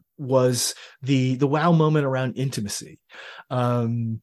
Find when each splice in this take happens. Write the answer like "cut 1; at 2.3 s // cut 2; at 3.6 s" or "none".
cut 1; at 3.2 s